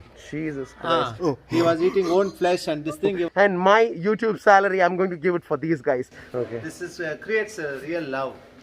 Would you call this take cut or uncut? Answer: cut